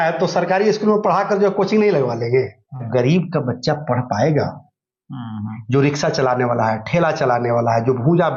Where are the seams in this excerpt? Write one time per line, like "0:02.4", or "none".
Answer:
0:02.9